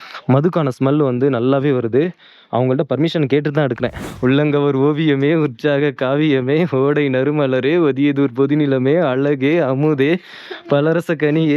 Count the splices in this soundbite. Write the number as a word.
one